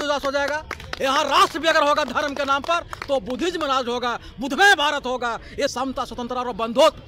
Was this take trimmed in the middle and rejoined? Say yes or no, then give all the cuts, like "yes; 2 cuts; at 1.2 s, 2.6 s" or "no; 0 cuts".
yes; 1 cut; at 5.7 s